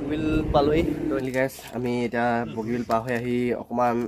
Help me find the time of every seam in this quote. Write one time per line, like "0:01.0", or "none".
0:01.2